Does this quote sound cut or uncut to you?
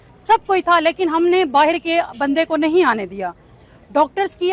uncut